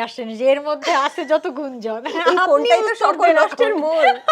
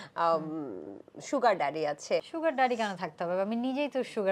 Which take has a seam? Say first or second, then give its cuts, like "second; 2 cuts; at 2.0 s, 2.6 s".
second; 1 cut; at 2.3 s